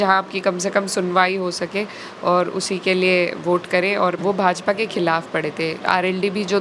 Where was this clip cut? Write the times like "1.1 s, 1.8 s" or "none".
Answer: 4.2 s